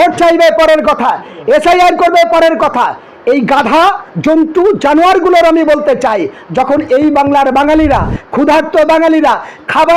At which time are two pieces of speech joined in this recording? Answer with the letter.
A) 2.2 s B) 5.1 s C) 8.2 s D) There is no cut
D